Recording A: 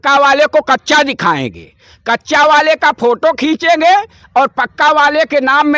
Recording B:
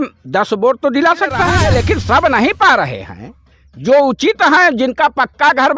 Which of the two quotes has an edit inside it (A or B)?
B